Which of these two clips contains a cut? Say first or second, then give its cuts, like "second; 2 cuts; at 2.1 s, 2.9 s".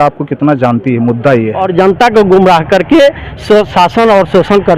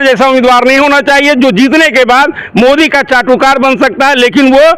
first; 1 cut; at 1.6 s